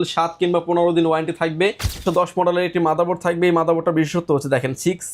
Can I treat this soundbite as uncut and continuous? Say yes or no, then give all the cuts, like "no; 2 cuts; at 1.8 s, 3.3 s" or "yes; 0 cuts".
no; 1 cut; at 2.0 s